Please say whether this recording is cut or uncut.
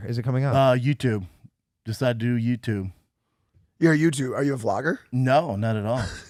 uncut